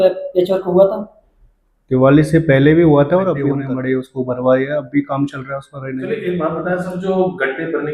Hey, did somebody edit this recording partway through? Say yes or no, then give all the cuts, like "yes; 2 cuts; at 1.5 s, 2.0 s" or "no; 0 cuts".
yes; 2 cuts; at 3.5 s, 6.0 s